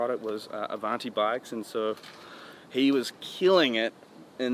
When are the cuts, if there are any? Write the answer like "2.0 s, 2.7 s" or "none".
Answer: none